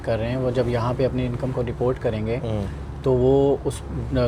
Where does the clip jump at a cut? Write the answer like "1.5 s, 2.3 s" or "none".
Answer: none